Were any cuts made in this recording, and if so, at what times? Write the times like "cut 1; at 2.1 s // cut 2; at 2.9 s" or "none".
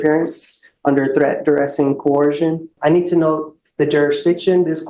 cut 1; at 2.7 s